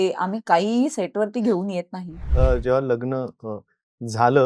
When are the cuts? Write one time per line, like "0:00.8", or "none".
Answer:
0:02.2